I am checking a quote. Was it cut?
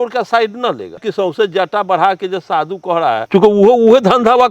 yes; 2 cuts; at 1.0 s, 3.2 s

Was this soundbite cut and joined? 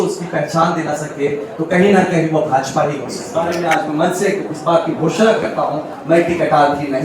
yes; 1 cut; at 3.2 s

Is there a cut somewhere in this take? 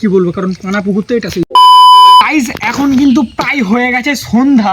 yes; 2 cuts; at 1.5 s, 2.3 s

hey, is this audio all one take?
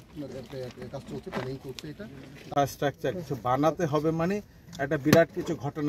no; 1 cut; at 2.5 s

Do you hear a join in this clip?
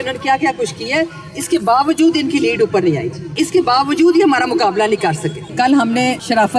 yes; 1 cut; at 5.5 s

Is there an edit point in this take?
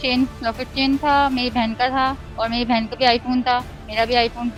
no; 0 cuts

